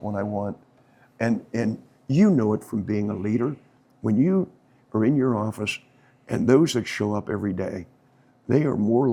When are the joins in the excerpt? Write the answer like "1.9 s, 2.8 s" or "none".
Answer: none